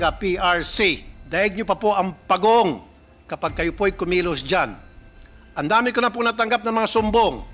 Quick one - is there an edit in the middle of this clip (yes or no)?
yes